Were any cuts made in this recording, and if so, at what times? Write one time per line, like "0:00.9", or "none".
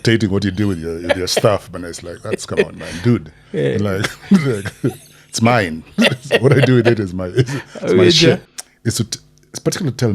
0:08.5